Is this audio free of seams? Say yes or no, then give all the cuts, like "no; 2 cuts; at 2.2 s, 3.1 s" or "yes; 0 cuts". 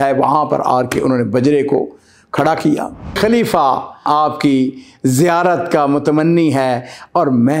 no; 1 cut; at 3.2 s